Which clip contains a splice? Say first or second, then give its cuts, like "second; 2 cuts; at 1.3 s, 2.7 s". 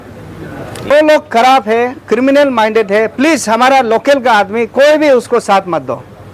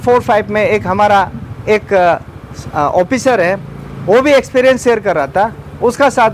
first; 1 cut; at 0.9 s